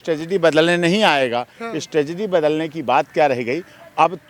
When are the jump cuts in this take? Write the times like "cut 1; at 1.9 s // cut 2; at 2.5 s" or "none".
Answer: none